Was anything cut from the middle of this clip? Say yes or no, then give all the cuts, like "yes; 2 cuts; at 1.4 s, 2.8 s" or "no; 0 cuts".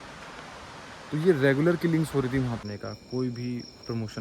yes; 1 cut; at 2.6 s